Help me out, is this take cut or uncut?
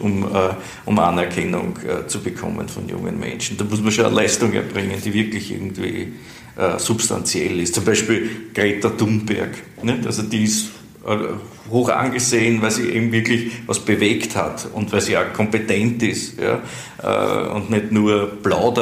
uncut